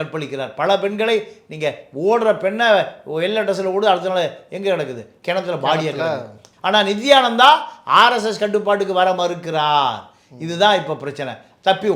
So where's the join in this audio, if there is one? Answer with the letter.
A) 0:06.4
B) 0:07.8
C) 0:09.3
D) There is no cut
A